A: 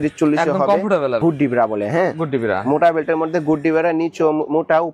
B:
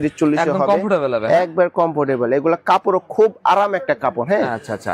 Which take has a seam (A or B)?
A